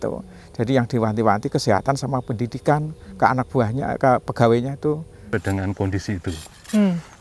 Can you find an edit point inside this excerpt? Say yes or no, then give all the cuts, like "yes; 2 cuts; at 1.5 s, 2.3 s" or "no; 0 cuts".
yes; 1 cut; at 5.3 s